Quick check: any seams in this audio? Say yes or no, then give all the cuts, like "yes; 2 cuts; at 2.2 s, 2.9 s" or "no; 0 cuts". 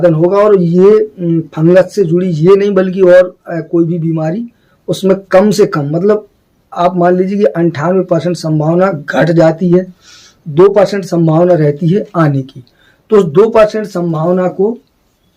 no; 0 cuts